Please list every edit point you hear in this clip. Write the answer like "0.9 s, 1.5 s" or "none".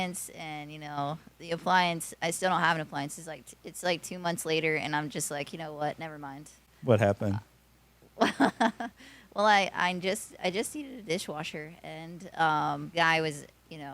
12.9 s